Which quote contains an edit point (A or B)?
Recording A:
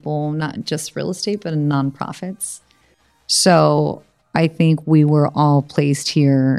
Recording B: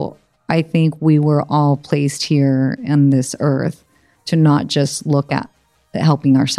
A